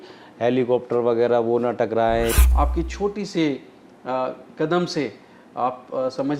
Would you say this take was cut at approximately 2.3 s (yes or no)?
yes